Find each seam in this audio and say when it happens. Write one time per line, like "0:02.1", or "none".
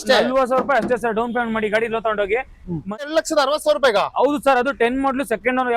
0:03.1